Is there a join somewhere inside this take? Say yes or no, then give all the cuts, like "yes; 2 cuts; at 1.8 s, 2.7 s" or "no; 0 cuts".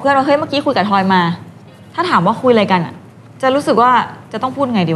no; 0 cuts